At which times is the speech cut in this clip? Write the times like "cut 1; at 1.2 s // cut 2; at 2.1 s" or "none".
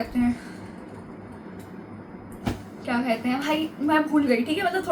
none

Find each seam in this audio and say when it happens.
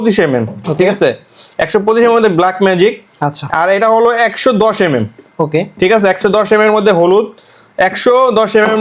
none

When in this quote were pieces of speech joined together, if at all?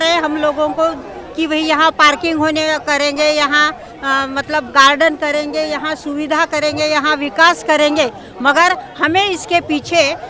none

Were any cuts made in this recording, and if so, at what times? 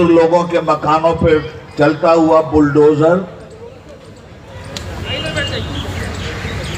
none

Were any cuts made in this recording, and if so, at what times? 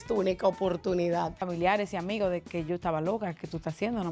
cut 1; at 1.4 s

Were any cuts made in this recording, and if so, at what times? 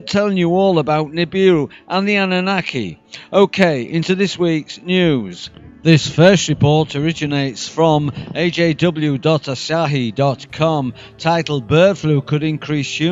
cut 1; at 7.6 s

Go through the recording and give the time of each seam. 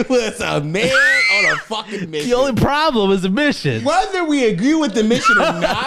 cut 1; at 3.8 s

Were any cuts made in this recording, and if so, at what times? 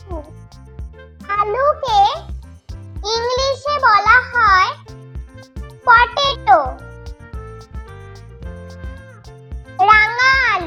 none

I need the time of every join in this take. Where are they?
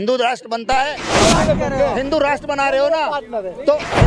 cut 1; at 1.2 s

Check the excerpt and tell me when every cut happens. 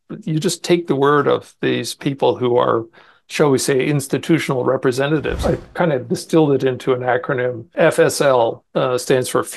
cut 1; at 5.4 s // cut 2; at 7.7 s

